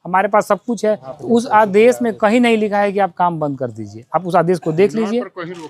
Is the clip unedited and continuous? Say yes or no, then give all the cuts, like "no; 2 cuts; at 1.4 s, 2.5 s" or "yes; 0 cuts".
no; 1 cut; at 1.1 s